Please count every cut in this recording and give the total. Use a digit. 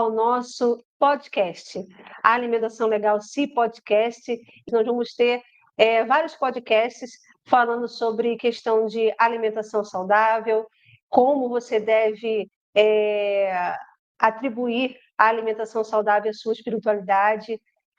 1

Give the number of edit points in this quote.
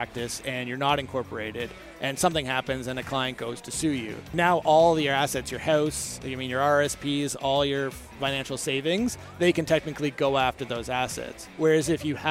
1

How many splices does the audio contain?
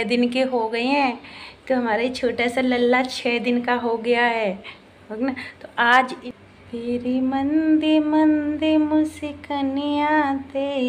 1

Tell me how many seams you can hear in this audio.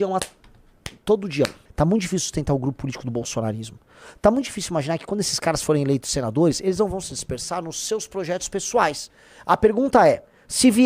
1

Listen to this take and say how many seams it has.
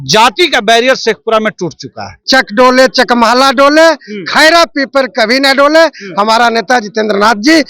1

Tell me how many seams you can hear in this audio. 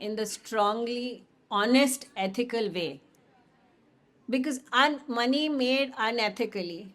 0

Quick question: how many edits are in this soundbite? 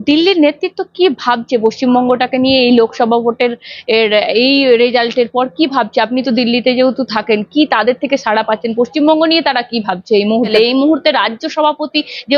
1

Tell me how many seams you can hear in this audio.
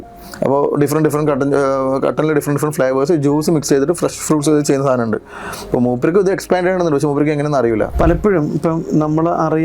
1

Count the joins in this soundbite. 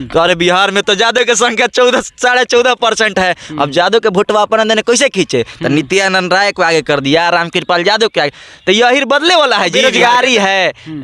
1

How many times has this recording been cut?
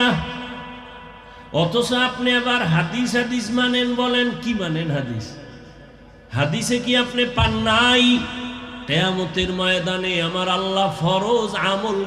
0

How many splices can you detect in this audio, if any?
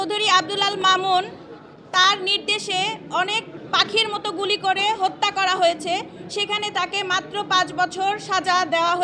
1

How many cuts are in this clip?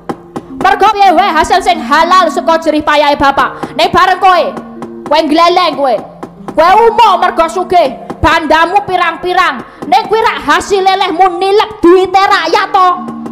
1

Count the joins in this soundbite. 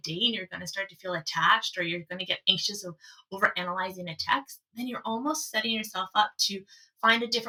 0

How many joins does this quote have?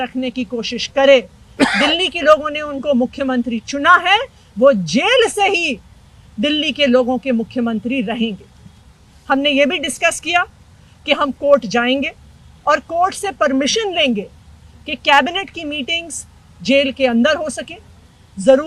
0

